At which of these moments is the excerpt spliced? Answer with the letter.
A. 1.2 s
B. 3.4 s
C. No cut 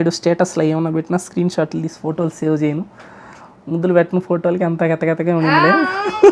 C